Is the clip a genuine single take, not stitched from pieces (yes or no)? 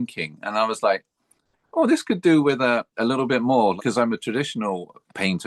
no